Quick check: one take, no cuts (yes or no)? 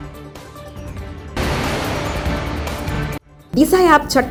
yes